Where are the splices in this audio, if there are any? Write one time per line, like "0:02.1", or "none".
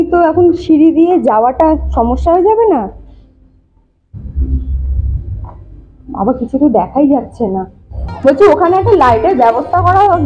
none